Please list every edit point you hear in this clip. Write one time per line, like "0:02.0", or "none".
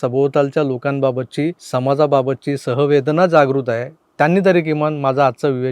0:01.6